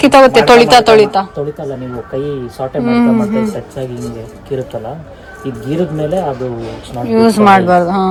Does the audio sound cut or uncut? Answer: uncut